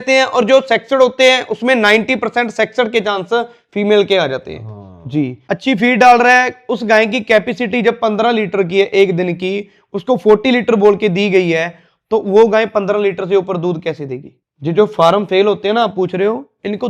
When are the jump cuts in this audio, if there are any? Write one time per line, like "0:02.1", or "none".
0:05.4
0:14.3